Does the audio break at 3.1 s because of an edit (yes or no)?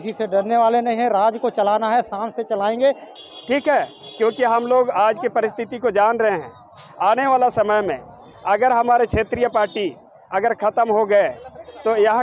yes